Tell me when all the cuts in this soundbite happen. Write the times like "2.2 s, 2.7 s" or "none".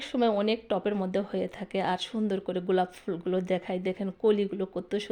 none